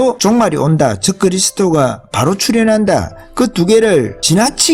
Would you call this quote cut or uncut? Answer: uncut